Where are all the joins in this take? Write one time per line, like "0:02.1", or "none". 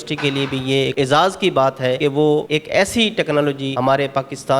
0:00.9
0:02.2
0:03.7

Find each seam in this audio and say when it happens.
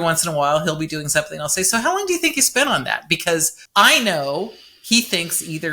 0:03.6

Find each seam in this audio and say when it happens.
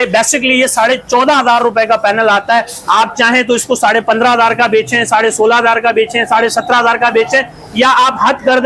none

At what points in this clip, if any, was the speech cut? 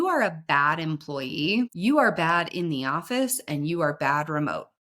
0:01.7

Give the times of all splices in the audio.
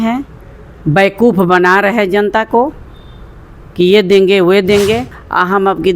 0:05.0

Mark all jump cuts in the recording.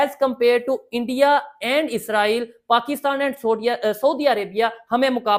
none

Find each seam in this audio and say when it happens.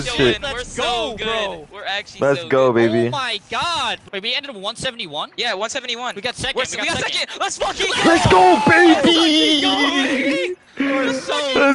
0:01.7
0:04.0

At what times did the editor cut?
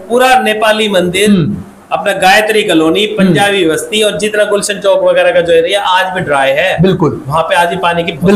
none

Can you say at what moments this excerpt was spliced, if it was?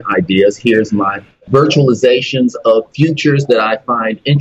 0:01.4

